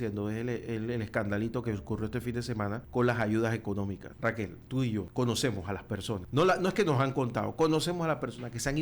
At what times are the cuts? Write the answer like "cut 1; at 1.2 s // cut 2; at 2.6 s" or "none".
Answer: cut 1; at 2.8 s // cut 2; at 4.1 s // cut 3; at 5.1 s // cut 4; at 6.2 s